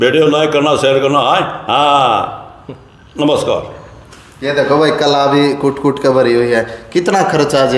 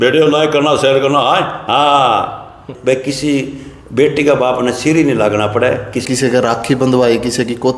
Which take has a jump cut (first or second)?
second